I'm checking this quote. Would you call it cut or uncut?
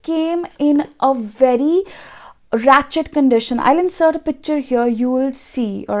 uncut